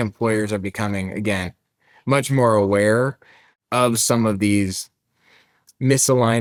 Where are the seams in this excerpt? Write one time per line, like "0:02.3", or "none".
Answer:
none